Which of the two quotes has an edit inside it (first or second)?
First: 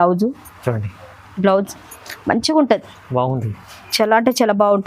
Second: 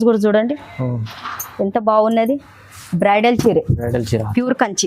second